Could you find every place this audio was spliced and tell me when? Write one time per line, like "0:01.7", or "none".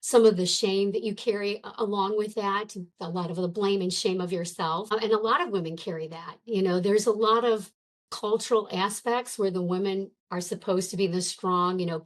0:04.9